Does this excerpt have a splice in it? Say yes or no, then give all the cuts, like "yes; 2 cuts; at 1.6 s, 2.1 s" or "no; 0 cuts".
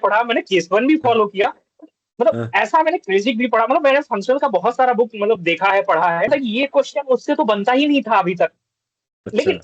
yes; 1 cut; at 6.3 s